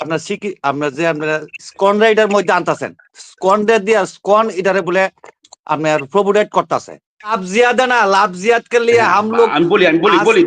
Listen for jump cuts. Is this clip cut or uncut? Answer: cut